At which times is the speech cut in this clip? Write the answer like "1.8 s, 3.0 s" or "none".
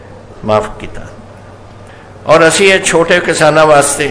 2.1 s